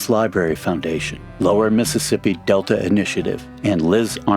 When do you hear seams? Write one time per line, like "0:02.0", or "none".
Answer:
0:03.5